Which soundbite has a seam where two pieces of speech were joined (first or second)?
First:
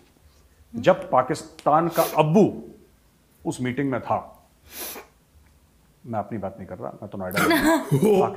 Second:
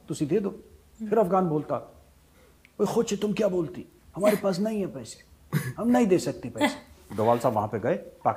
second